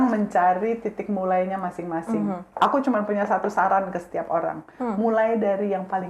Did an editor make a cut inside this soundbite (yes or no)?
no